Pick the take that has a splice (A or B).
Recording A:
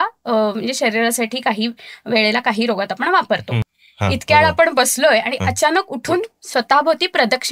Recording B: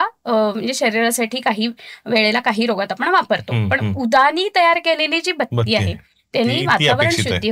A